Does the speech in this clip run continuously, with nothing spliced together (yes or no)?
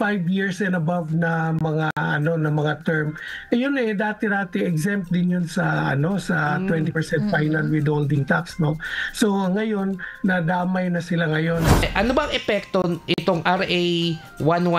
no